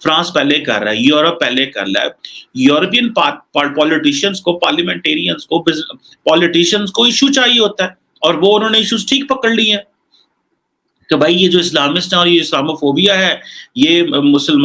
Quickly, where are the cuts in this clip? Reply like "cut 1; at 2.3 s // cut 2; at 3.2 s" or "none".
none